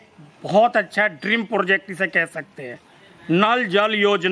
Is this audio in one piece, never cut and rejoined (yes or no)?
yes